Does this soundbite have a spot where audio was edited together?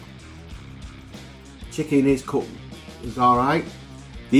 no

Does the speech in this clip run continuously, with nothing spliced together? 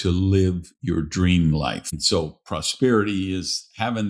no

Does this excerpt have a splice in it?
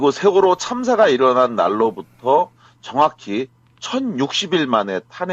yes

